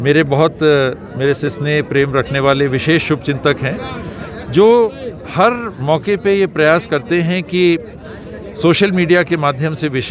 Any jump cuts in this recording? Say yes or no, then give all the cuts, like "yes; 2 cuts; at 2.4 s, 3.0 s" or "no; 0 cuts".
no; 0 cuts